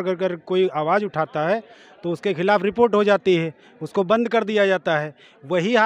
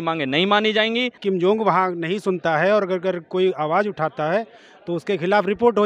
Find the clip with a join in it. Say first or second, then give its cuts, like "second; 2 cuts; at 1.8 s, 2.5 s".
second; 1 cut; at 1.2 s